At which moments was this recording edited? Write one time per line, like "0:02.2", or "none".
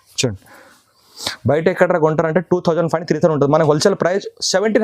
none